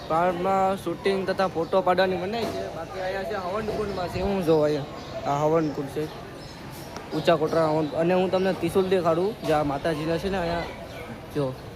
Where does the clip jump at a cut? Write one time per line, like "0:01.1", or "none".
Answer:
none